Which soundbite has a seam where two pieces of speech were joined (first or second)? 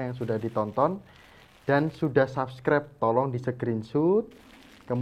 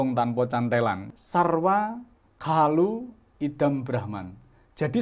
second